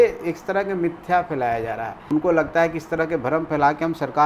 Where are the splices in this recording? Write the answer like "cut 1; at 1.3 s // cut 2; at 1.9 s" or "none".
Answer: cut 1; at 1.9 s